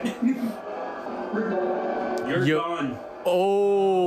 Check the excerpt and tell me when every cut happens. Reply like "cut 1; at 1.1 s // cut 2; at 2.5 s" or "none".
cut 1; at 1.0 s